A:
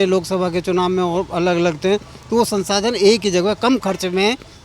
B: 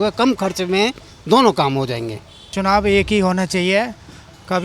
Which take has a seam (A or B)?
B